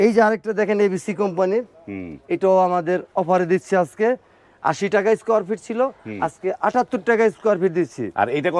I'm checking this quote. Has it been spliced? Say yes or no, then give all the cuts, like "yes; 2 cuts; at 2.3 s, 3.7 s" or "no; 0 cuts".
no; 0 cuts